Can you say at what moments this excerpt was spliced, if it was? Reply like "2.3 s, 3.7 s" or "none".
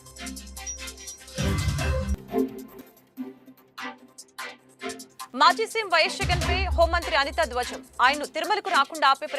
0.9 s